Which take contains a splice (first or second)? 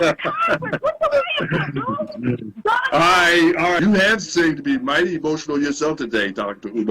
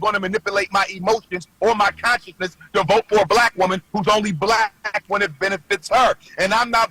first